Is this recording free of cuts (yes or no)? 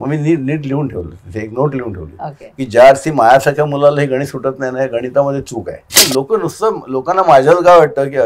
no